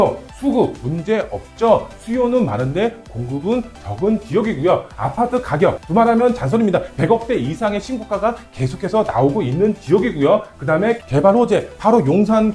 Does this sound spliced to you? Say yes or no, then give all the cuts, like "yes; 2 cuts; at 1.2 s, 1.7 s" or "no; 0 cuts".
no; 0 cuts